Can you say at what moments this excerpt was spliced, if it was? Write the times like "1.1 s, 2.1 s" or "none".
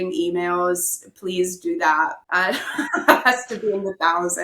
2.2 s